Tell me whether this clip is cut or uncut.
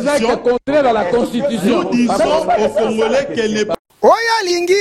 cut